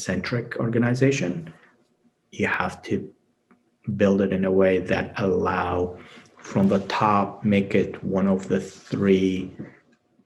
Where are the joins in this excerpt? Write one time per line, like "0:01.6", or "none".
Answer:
none